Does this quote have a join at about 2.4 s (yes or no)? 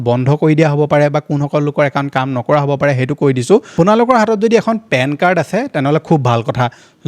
no